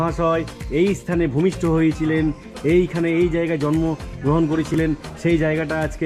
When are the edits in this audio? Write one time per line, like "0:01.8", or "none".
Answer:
none